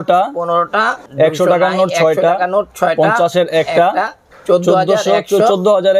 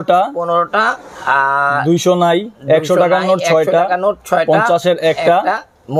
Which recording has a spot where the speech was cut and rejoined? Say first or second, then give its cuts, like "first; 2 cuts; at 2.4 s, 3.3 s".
first; 2 cuts; at 1.0 s, 4.3 s